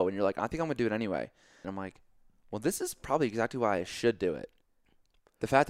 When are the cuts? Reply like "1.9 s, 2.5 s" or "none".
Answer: 1.7 s